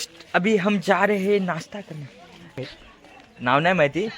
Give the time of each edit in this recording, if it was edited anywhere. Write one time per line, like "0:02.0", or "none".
0:02.6